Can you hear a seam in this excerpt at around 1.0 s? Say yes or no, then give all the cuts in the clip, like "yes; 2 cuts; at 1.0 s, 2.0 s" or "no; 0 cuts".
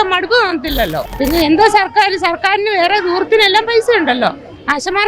yes; 1 cut; at 1.0 s